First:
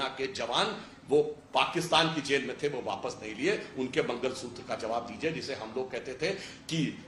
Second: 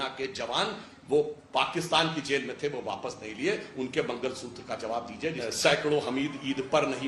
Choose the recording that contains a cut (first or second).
second